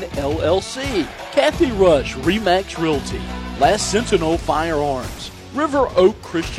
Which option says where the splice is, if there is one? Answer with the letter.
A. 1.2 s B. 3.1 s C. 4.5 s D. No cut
A